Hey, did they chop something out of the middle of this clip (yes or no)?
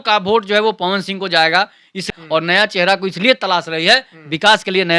yes